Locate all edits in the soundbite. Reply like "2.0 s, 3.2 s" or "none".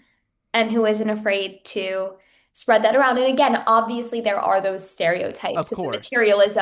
none